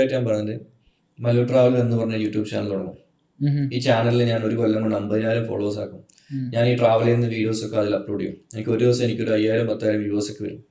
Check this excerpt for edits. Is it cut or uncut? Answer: uncut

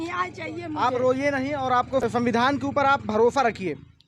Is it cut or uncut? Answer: cut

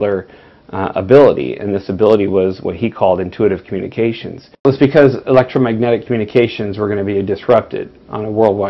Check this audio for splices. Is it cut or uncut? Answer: cut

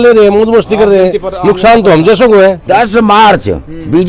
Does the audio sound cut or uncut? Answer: cut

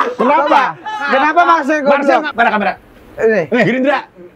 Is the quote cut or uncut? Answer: cut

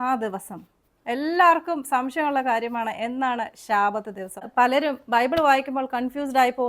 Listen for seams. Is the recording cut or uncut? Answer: cut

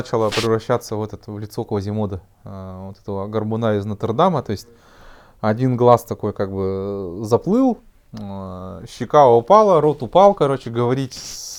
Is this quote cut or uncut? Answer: uncut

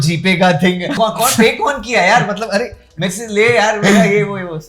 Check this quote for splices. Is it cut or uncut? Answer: cut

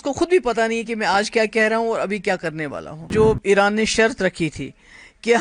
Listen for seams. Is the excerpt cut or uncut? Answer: cut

